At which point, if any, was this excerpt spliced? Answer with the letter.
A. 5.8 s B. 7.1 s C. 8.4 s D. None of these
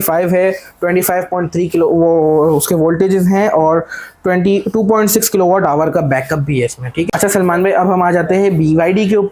B